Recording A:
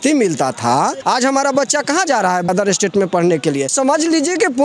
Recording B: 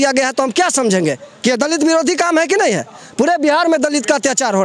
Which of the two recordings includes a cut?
A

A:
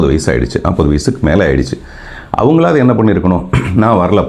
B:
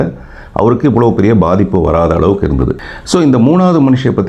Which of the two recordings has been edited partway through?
B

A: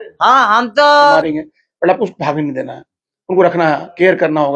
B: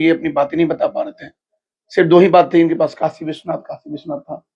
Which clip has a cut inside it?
A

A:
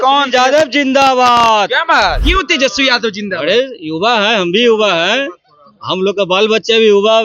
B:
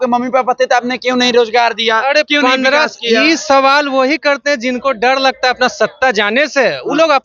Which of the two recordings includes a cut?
A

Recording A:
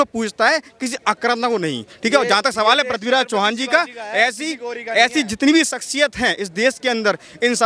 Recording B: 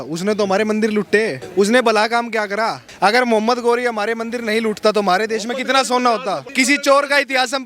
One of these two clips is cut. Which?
B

